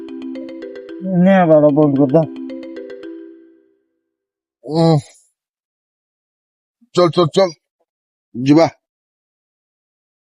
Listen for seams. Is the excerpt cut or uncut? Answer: cut